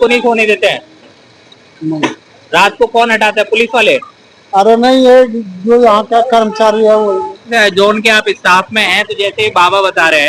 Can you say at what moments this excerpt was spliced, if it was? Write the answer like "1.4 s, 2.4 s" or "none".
7.5 s